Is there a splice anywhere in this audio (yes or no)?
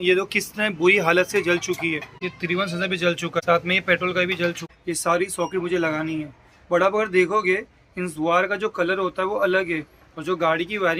yes